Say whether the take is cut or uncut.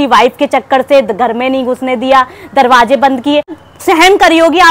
cut